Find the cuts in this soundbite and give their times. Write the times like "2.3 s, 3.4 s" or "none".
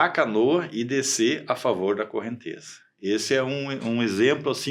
none

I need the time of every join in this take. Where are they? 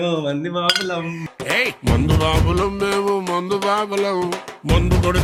none

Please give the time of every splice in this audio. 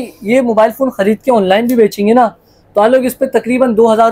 none

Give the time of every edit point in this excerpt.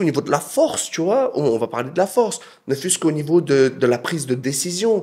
none

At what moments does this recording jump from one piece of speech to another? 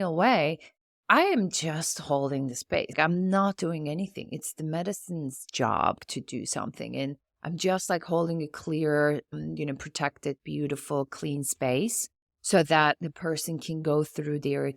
2.9 s, 6.0 s, 9.3 s

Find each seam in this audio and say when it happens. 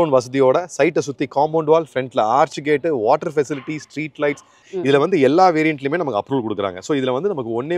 4.7 s

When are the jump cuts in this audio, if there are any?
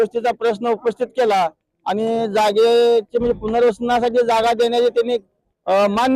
none

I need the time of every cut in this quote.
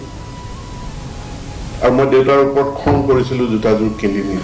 none

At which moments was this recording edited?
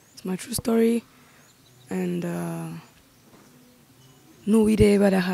none

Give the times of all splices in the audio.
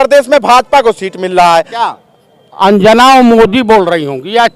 1.8 s

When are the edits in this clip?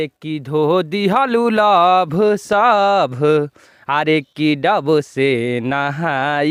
none

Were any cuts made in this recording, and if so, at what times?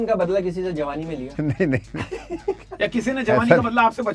1.3 s

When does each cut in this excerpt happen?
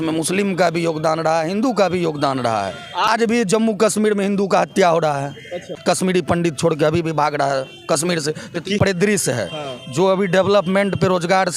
3.1 s, 5.9 s, 8.8 s

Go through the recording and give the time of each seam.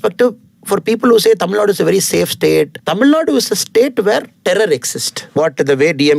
2.8 s, 4.3 s, 5.3 s

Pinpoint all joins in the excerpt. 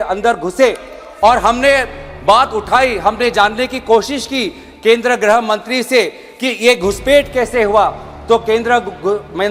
none

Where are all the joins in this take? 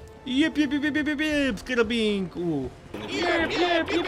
none

